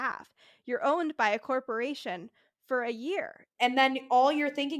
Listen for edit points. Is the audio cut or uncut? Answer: cut